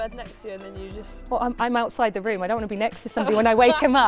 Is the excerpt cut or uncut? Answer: uncut